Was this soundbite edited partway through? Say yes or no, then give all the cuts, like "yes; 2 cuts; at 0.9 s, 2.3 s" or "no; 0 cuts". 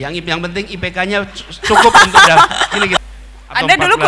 yes; 1 cut; at 3.0 s